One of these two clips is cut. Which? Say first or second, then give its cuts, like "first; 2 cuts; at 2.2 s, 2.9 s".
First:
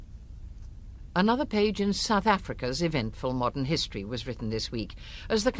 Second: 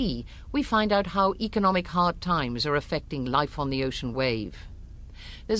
first; 1 cut; at 4.6 s